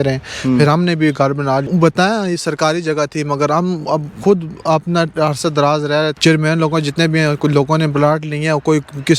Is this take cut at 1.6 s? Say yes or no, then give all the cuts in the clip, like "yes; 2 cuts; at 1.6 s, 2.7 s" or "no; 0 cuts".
yes; 2 cuts; at 1.6 s, 6.1 s